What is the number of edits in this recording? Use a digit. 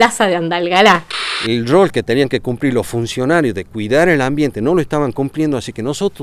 1